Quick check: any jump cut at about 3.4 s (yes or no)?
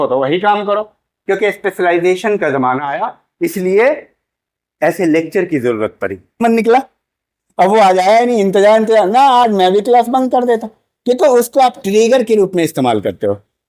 no